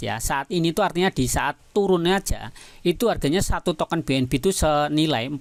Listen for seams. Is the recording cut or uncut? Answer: uncut